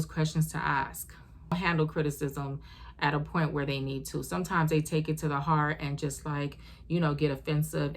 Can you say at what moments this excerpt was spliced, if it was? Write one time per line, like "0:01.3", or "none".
0:01.5